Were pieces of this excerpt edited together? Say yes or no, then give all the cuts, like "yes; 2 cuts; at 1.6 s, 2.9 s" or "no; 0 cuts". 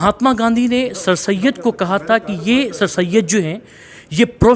no; 0 cuts